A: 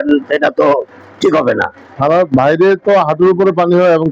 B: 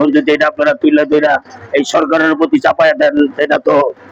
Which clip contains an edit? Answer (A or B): A